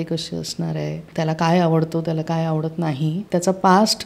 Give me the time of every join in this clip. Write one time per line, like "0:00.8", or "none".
0:01.1
0:03.2